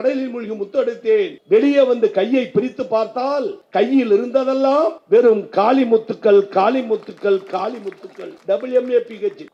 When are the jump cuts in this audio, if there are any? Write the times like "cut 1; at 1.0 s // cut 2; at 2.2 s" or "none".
none